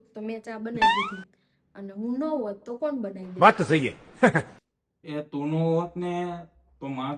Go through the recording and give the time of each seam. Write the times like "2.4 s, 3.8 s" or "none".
none